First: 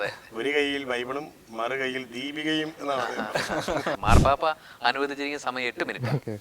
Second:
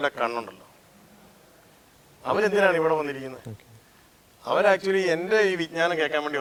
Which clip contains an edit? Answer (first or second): first